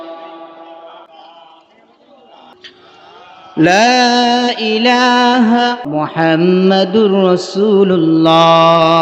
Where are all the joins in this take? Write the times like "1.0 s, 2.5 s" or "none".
1.0 s, 2.5 s, 5.8 s